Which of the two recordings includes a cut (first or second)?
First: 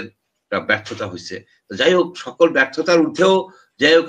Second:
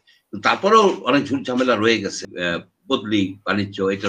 second